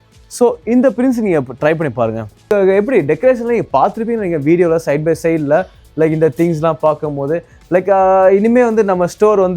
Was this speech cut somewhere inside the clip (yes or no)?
yes